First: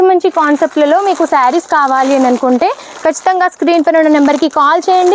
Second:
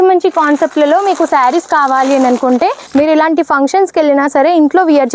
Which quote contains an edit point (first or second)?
second